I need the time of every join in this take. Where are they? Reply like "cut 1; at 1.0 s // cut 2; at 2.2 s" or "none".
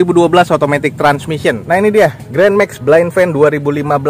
cut 1; at 1.6 s